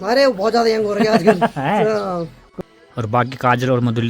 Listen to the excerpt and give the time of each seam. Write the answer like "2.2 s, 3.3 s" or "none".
2.4 s

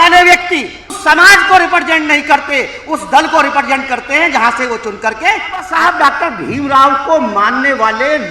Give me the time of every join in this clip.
1.0 s, 5.7 s

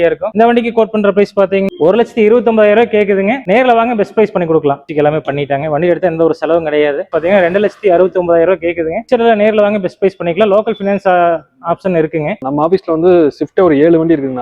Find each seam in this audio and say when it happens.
4.9 s, 7.0 s, 12.4 s

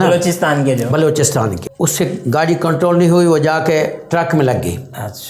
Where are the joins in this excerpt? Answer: 1.6 s

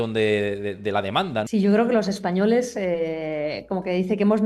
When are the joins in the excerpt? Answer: 1.5 s

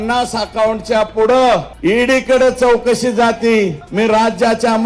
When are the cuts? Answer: 1.7 s, 3.8 s

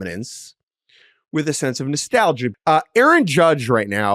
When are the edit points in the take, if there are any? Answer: 2.6 s

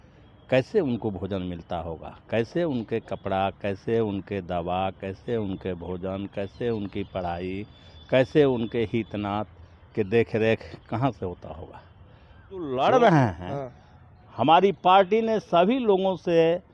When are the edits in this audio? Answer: 12.7 s

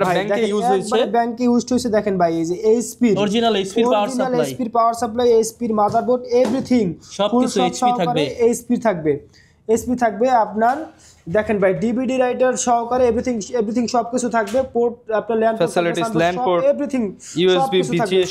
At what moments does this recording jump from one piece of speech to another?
none

